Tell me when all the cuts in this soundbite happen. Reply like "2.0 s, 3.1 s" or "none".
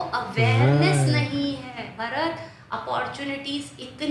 none